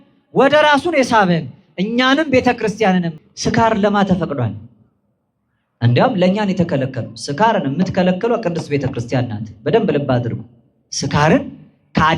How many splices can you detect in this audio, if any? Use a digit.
1